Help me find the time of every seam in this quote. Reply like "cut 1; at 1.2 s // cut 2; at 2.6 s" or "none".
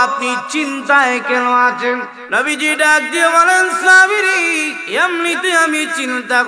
cut 1; at 2.2 s // cut 2; at 4.8 s